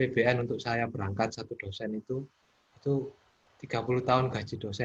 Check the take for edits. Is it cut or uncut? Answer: uncut